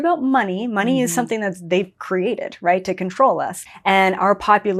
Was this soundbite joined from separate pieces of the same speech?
yes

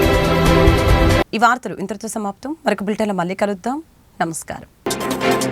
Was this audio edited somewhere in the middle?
no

